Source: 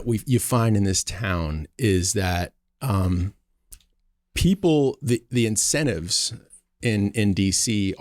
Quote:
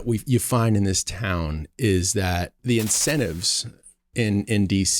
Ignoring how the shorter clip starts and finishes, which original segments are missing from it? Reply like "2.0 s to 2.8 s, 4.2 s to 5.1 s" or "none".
2.6 s to 5.3 s